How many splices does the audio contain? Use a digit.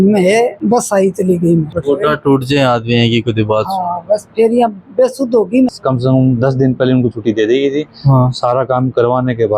2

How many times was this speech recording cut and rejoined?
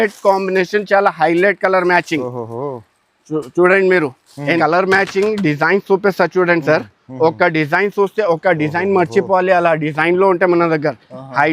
1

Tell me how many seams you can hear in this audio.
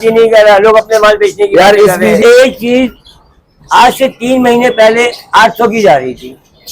1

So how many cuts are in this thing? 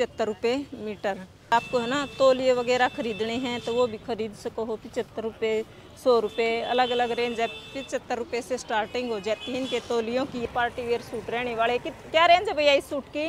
2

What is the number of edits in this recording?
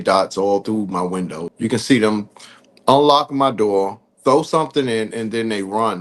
1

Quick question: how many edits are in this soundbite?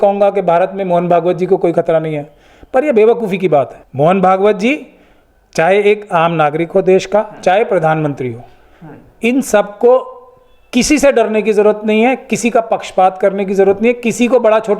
1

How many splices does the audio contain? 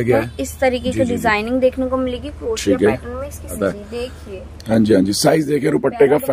1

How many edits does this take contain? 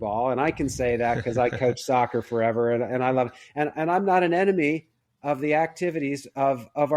0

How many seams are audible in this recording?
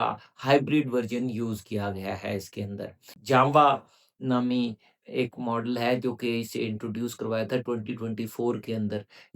1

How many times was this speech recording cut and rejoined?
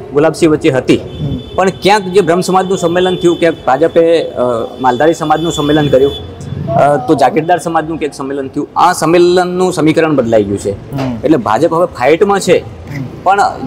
0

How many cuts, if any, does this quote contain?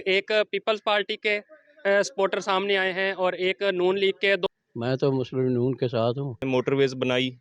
2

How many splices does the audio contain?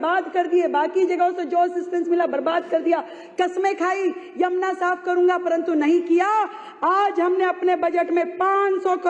0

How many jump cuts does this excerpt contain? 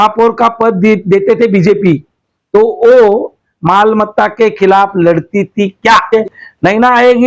1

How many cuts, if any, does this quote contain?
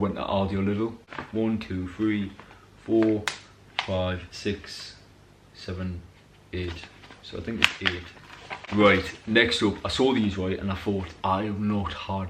2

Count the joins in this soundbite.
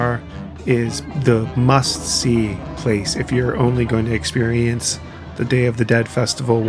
1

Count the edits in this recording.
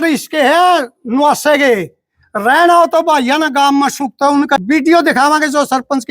1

